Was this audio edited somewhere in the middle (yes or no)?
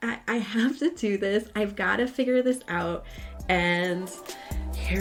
no